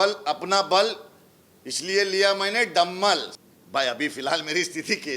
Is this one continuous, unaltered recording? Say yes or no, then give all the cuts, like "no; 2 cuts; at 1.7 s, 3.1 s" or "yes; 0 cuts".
no; 1 cut; at 3.3 s